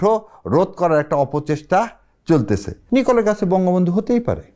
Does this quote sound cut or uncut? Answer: cut